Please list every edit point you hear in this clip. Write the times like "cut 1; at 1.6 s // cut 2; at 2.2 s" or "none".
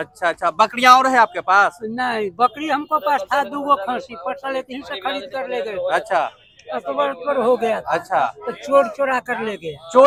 none